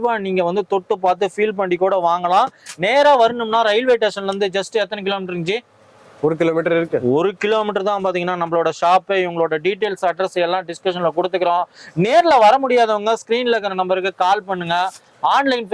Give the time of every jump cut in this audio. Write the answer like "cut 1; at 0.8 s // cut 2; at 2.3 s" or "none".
none

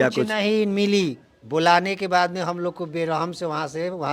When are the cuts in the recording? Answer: none

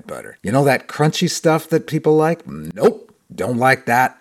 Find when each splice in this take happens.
none

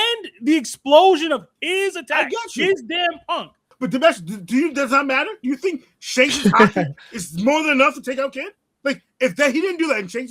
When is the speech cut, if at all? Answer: none

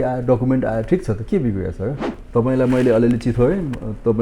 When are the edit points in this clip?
cut 1; at 2.1 s

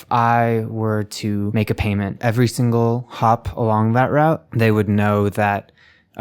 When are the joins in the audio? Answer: cut 1; at 2.1 s // cut 2; at 4.5 s

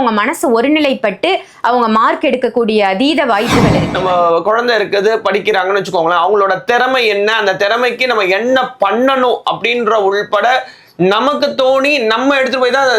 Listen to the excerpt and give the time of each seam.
cut 1; at 3.8 s

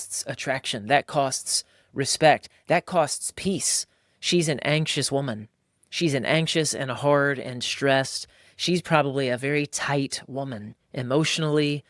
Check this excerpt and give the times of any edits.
none

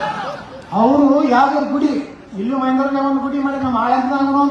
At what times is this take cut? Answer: none

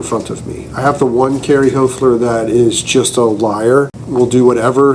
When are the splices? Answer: cut 1; at 4.0 s

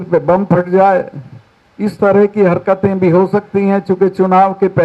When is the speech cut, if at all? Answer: none

